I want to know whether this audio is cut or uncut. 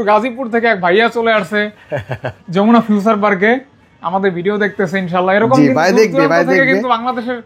uncut